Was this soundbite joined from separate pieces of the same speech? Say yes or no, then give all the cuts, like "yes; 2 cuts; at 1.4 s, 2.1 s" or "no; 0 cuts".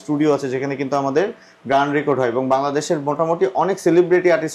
no; 0 cuts